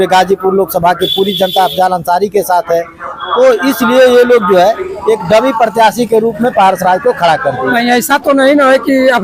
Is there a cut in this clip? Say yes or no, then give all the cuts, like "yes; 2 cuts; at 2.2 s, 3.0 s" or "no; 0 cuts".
no; 0 cuts